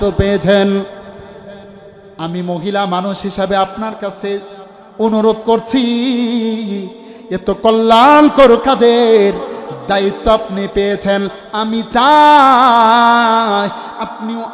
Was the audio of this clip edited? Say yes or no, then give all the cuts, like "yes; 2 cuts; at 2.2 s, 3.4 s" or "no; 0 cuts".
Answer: no; 0 cuts